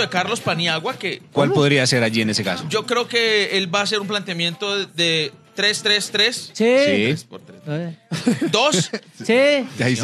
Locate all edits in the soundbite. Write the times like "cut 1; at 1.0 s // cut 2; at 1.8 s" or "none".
none